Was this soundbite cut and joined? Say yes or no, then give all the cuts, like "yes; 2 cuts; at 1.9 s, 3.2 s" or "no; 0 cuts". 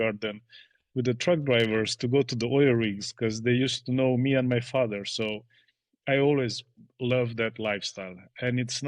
no; 0 cuts